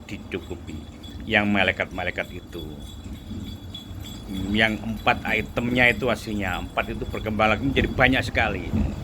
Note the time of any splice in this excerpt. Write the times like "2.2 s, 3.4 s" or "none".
none